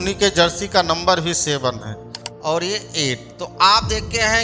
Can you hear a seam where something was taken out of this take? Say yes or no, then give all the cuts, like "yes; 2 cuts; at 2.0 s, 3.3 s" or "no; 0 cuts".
yes; 1 cut; at 1.9 s